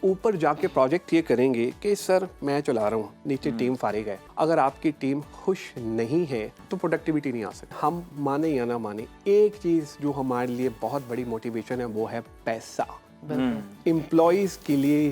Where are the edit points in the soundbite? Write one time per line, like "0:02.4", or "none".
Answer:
0:04.2
0:06.6
0:07.7